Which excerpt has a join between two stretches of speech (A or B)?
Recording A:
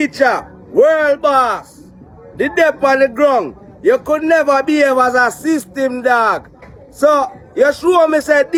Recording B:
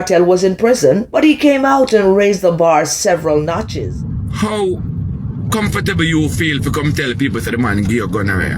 B